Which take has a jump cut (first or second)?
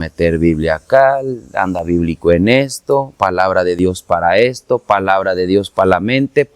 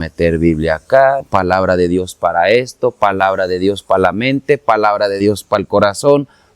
second